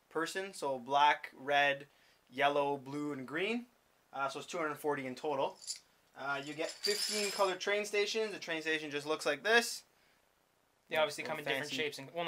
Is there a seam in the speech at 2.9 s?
yes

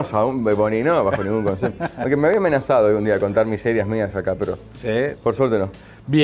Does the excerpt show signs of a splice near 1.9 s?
yes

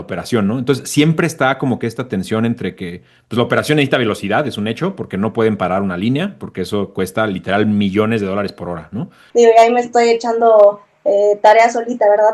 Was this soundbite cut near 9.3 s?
yes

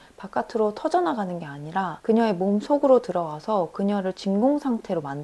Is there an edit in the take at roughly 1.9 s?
yes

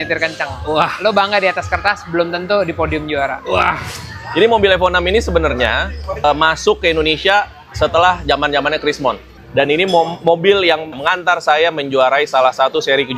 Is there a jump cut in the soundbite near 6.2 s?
yes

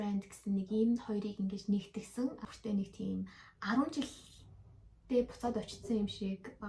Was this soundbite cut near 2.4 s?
yes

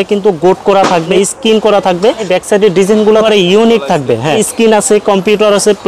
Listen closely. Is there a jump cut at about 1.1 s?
yes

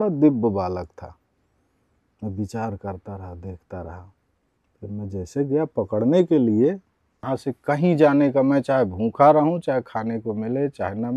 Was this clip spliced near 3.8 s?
no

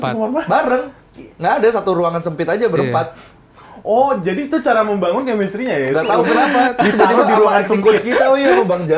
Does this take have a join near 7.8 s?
no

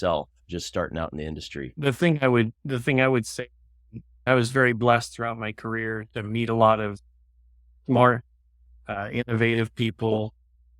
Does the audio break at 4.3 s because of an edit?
yes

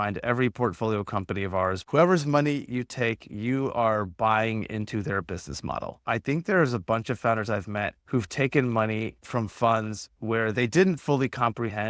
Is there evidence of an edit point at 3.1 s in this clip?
no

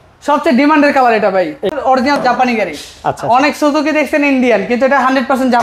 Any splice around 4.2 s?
no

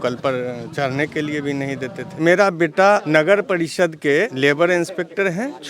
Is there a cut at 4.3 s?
yes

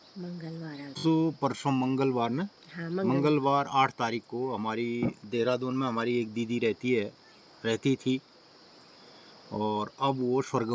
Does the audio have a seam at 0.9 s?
yes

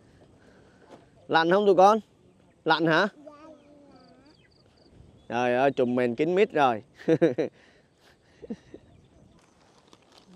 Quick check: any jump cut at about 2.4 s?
no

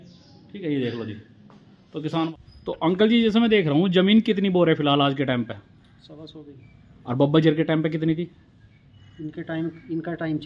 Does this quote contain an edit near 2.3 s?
yes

